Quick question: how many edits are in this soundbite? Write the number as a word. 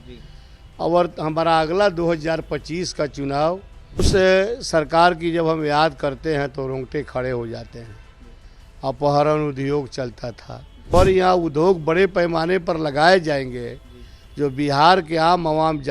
two